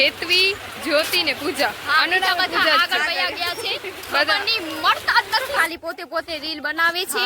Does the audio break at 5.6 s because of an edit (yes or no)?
yes